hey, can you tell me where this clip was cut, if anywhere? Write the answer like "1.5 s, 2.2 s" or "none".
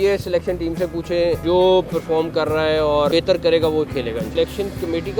1.4 s, 3.1 s, 4.3 s